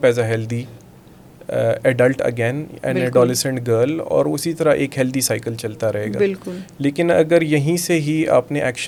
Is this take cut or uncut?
uncut